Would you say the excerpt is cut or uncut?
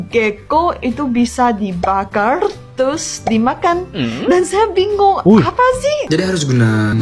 cut